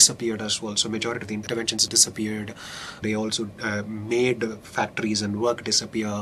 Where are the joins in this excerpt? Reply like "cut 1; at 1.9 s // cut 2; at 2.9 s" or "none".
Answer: cut 1; at 1.6 s // cut 2; at 3.0 s